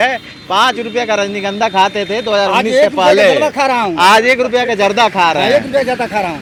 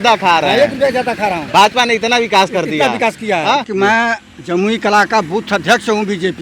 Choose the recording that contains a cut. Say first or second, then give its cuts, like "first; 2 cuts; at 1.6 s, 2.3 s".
second; 1 cut; at 3.7 s